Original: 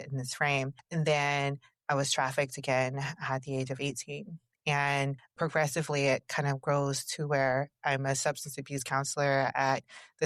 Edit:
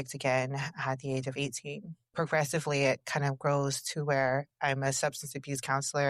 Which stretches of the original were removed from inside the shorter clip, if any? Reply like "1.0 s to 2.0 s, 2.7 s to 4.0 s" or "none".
4.4 s to 5.2 s